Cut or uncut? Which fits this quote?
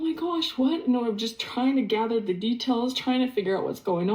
uncut